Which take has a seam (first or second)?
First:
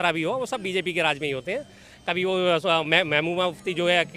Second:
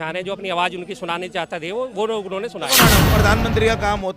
second